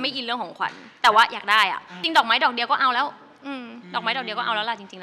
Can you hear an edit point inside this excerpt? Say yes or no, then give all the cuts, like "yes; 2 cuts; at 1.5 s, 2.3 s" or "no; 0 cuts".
yes; 1 cut; at 1.9 s